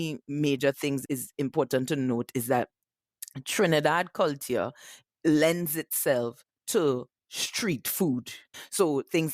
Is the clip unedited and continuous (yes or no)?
no